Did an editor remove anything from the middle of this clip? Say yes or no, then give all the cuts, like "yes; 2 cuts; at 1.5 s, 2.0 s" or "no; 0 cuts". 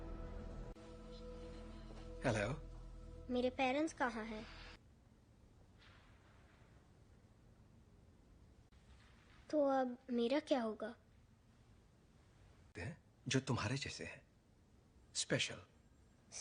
yes; 1 cut; at 4.8 s